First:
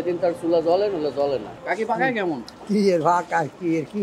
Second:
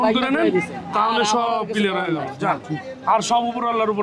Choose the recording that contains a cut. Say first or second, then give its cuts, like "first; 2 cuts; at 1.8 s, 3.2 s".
first; 2 cuts; at 1.5 s, 2.5 s